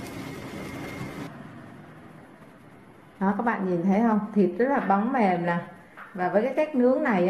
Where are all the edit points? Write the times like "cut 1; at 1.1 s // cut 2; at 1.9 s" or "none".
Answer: cut 1; at 1.3 s